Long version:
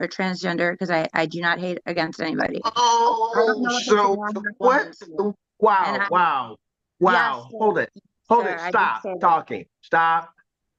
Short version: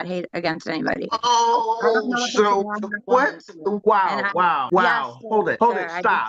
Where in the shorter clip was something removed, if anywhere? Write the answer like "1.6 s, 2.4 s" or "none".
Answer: 3.8 s, 4.7 s, 5.6 s

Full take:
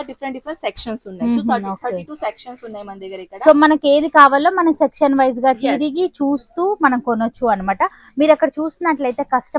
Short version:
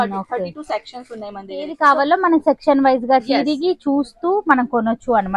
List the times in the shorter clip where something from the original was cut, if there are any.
1.7 s

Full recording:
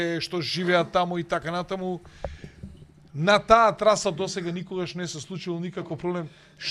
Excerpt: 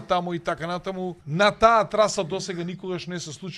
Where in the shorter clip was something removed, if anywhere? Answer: 1.2 s

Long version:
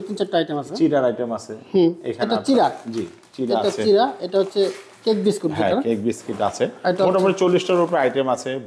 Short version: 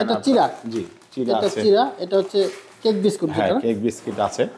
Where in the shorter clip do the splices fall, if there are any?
none

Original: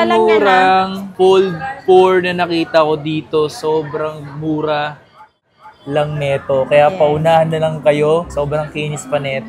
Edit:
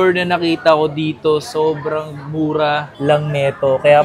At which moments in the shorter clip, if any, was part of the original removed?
2.9 s

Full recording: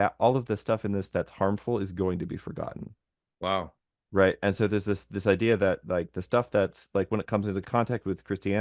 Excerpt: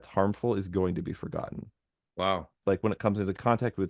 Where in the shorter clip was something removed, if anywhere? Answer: 2.5 s

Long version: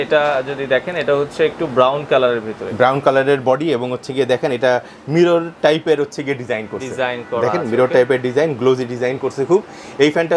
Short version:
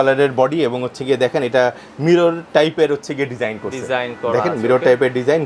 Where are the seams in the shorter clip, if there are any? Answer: none

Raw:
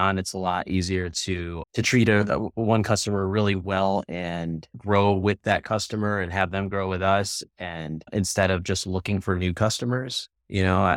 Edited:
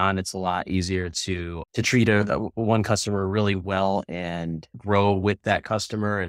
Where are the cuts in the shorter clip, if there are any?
none

